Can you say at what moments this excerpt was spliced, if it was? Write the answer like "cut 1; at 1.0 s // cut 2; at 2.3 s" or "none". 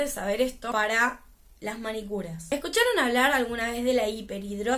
cut 1; at 0.7 s // cut 2; at 2.4 s